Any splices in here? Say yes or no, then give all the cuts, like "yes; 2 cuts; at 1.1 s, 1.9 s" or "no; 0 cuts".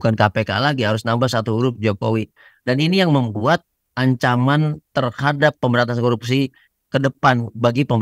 yes; 1 cut; at 5.6 s